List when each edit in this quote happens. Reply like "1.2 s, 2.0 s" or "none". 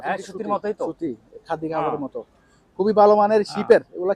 none